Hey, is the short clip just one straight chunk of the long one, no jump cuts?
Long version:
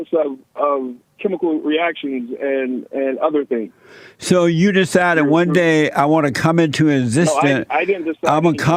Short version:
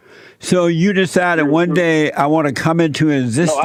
yes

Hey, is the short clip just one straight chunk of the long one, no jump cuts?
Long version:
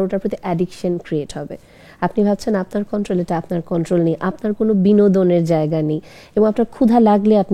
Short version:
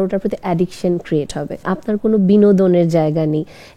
no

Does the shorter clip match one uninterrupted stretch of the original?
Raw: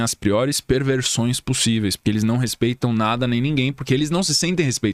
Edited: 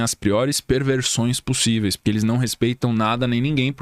yes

